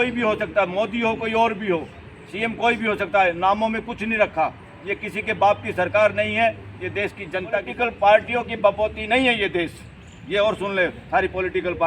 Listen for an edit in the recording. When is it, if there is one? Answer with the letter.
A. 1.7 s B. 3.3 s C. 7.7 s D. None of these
C